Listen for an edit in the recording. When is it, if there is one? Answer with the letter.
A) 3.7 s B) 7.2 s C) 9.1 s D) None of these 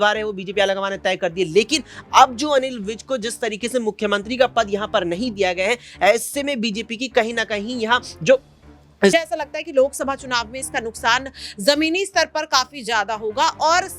C